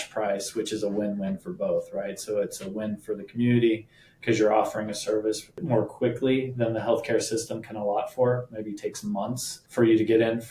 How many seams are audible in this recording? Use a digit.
2